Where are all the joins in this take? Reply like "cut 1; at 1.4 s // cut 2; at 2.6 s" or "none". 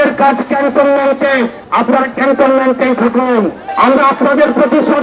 cut 1; at 1.6 s // cut 2; at 3.6 s